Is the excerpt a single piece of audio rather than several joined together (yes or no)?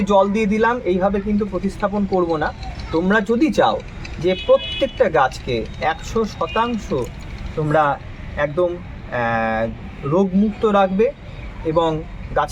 yes